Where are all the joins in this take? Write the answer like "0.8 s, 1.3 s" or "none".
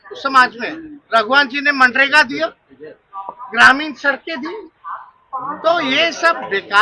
none